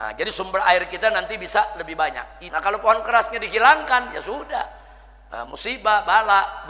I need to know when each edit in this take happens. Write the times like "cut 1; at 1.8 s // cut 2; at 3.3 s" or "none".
cut 1; at 2.4 s